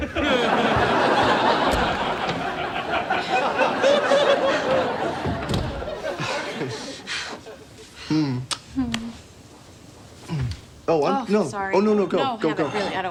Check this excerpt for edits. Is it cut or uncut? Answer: uncut